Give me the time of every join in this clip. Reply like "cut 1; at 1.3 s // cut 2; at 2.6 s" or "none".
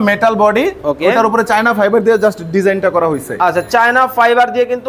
none